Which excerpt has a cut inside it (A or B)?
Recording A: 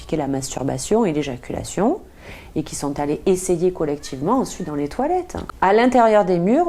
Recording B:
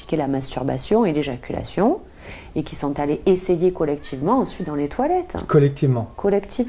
A